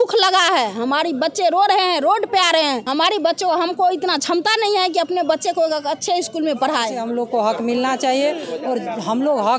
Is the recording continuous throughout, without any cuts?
no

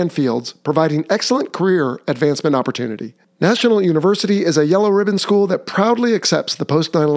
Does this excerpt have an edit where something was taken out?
no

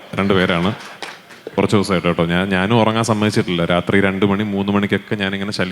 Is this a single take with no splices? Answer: no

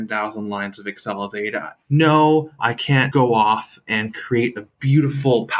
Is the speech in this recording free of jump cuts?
no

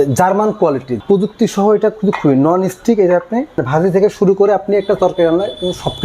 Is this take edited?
yes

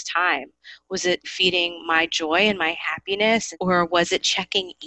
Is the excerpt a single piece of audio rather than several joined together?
no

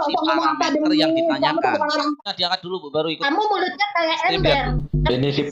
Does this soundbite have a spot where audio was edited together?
yes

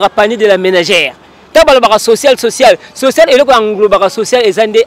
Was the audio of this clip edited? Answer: no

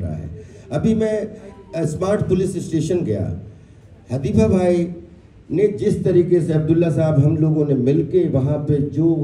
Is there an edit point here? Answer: no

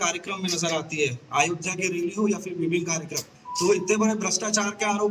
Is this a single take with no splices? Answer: yes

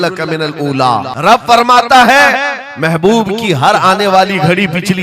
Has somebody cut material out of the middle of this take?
yes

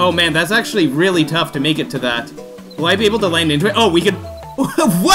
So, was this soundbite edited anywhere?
yes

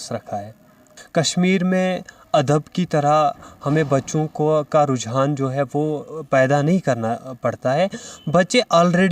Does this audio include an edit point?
yes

